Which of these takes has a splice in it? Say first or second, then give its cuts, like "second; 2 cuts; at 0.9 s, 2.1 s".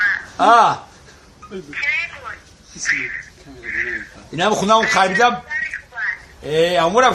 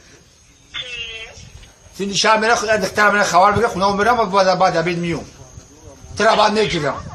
second; 1 cut; at 5.9 s